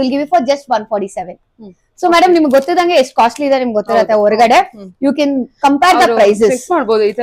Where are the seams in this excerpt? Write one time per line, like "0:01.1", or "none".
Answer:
none